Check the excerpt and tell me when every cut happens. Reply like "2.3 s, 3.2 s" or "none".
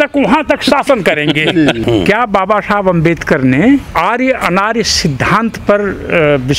1.8 s, 3.9 s